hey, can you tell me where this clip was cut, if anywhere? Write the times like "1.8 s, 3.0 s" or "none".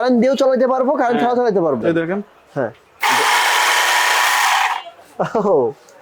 1.8 s